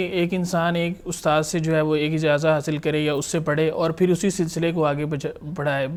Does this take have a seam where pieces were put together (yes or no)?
no